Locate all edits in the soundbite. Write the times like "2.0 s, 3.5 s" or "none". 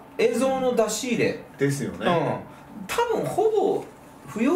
none

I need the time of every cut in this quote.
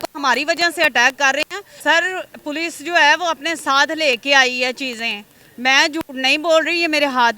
1.6 s

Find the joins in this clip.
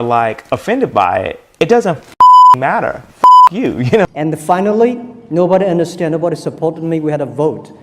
4.1 s

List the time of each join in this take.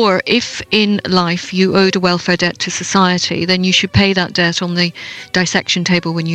none

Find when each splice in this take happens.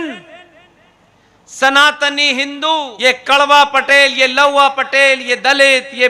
2.9 s

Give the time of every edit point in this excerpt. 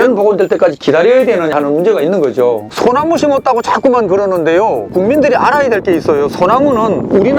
2.7 s

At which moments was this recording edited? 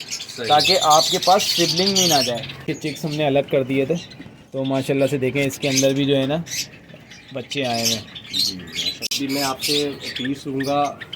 2.7 s, 9.1 s

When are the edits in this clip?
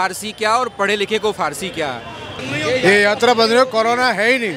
2.3 s

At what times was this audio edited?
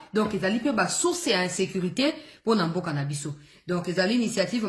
none

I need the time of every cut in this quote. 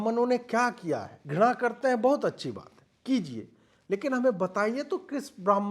1.2 s

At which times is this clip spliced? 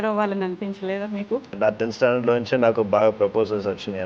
1.6 s

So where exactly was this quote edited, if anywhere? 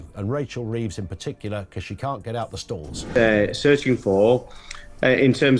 3.0 s

